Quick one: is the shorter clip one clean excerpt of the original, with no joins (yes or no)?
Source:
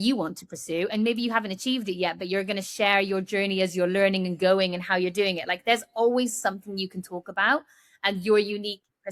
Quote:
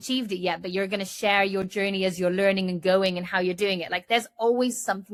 yes